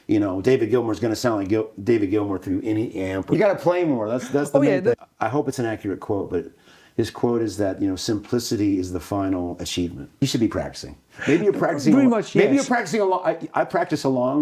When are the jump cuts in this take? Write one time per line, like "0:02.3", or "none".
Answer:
0:03.3
0:04.9
0:10.2